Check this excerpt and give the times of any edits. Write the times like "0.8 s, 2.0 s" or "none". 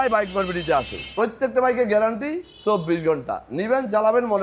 1.0 s